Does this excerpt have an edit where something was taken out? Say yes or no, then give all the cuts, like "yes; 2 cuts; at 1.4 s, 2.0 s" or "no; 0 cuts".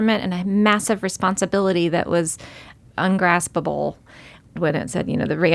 yes; 2 cuts; at 2.7 s, 4.5 s